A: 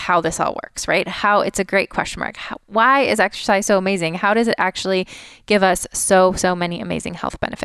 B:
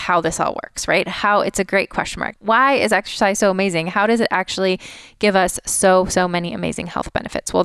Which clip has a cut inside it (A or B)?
B